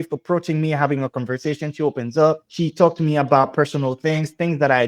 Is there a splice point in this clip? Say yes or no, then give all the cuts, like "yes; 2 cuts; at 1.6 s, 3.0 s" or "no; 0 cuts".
no; 0 cuts